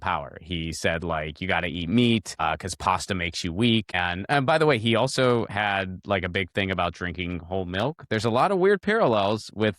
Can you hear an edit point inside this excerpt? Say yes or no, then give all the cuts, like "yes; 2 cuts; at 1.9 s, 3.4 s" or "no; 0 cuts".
yes; 2 cuts; at 2.4 s, 3.9 s